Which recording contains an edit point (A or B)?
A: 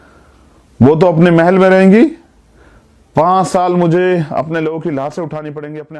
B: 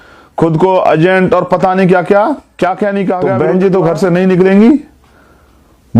B